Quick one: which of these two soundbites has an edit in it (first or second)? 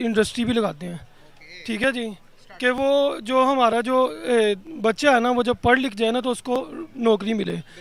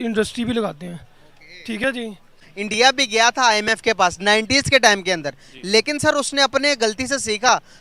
second